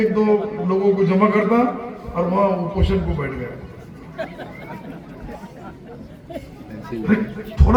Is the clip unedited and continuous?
yes; 0 cuts

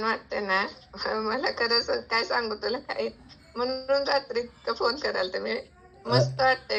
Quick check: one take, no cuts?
yes; 0 cuts

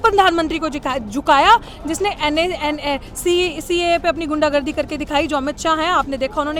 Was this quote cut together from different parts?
no; 0 cuts

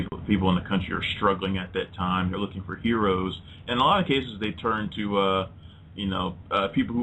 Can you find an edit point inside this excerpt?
yes; 1 cut; at 3.3 s

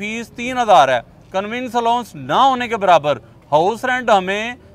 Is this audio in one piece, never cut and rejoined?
yes; 0 cuts

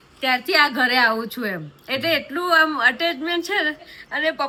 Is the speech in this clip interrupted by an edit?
no; 0 cuts

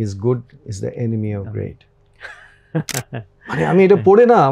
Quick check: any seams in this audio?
no; 0 cuts

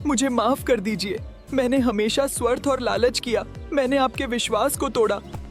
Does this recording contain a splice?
no; 0 cuts

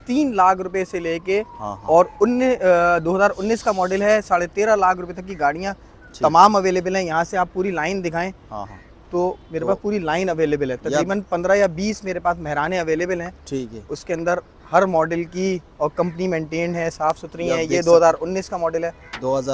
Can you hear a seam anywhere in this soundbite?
no; 0 cuts

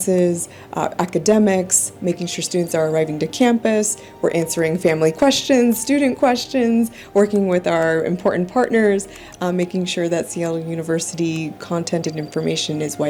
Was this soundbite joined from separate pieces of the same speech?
no; 0 cuts

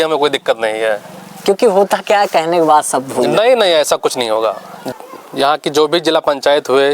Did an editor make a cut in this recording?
yes; 1 cut; at 4.9 s

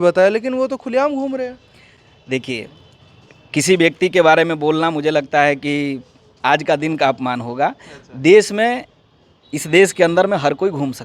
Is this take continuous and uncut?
yes; 0 cuts

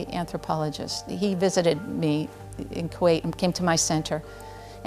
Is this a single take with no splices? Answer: yes; 0 cuts

